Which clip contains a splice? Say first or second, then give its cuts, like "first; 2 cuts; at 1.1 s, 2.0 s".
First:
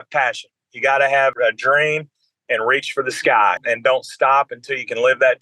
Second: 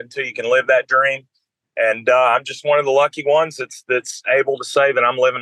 first; 2 cuts; at 1.3 s, 3.6 s